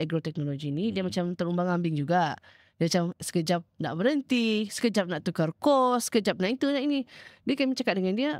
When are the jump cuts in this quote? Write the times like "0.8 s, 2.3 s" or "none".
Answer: none